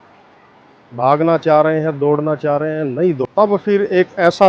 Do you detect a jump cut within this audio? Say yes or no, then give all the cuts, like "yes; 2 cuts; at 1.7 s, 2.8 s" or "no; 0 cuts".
yes; 1 cut; at 3.2 s